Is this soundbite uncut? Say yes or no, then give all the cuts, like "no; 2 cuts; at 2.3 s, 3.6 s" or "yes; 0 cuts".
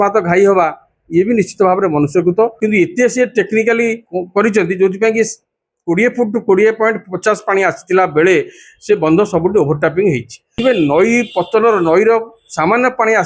no; 2 cuts; at 2.6 s, 10.6 s